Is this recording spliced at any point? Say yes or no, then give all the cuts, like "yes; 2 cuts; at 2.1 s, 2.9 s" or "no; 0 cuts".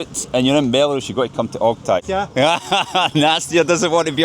yes; 1 cut; at 2.1 s